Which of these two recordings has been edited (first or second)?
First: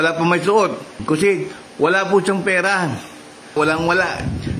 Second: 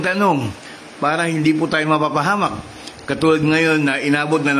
first